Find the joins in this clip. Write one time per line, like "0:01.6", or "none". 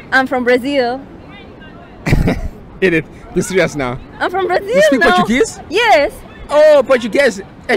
none